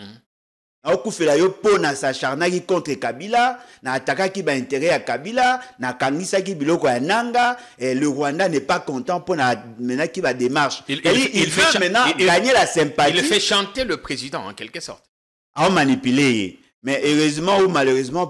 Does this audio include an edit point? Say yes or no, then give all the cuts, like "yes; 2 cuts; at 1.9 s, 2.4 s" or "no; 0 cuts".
no; 0 cuts